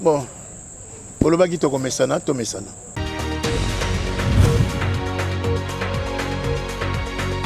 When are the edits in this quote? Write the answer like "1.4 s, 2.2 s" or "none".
2.8 s